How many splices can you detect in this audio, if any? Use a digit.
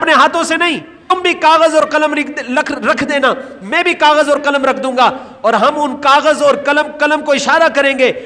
1